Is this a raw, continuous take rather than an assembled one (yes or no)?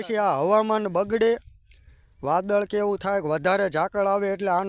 yes